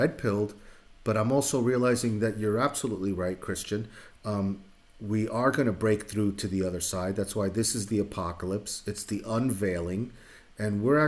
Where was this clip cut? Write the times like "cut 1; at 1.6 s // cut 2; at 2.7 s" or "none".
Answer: none